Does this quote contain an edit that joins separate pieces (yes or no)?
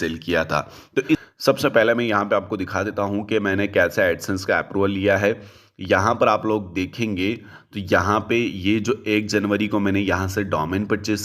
yes